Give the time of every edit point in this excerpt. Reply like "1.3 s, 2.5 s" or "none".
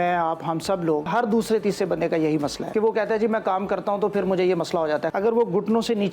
1.1 s, 2.6 s, 5.1 s